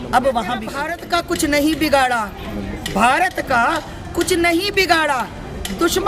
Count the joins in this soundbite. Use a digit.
1